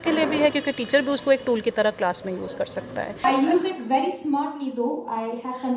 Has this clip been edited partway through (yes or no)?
yes